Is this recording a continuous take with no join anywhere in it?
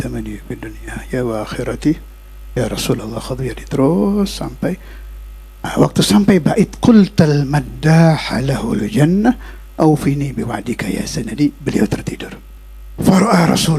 no; 1 cut; at 12.3 s

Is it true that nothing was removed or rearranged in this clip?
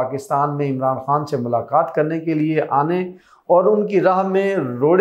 yes; 0 cuts

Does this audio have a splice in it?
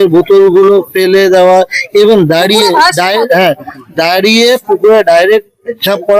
no; 0 cuts

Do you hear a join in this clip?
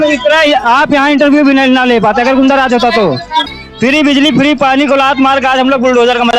yes; 1 cut; at 3.5 s

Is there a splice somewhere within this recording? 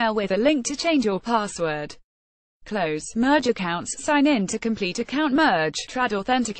no; 0 cuts

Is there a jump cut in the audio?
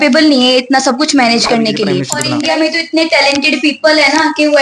yes; 1 cut; at 2.1 s

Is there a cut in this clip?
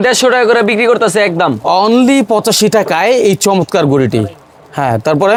no; 0 cuts

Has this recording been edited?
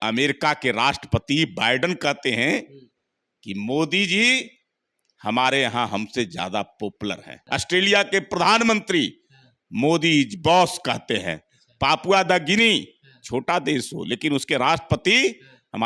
yes; 1 cut; at 7.3 s

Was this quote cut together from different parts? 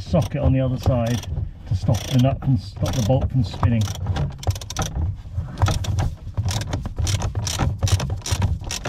no; 0 cuts

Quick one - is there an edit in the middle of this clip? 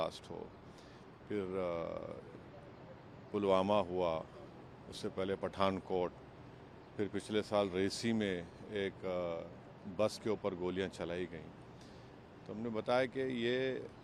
no; 0 cuts

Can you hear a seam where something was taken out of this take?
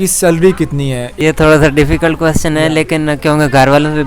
yes; 1 cut; at 1.1 s

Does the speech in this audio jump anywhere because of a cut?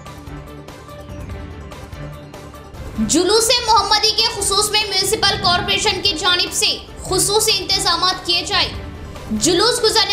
no; 0 cuts

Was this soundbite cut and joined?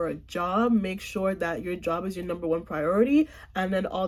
no; 0 cuts

